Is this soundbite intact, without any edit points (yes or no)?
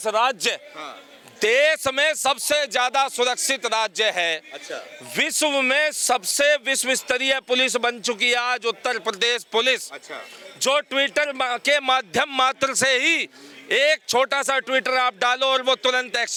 yes